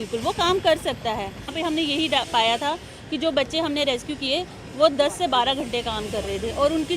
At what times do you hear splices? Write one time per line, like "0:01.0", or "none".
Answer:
0:01.5